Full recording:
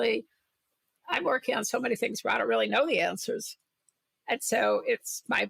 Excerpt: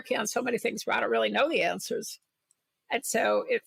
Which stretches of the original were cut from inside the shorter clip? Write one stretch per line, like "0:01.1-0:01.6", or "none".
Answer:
none